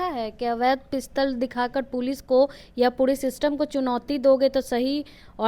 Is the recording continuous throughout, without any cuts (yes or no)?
yes